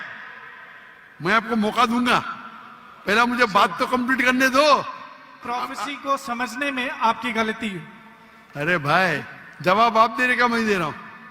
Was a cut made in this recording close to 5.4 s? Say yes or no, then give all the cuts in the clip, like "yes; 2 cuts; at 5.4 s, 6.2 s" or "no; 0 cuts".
yes; 1 cut; at 5.4 s